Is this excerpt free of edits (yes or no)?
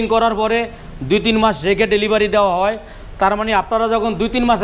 yes